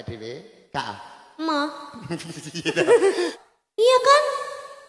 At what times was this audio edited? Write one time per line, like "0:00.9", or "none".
0:03.4